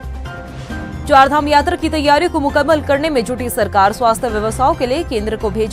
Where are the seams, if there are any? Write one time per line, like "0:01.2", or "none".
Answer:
0:00.9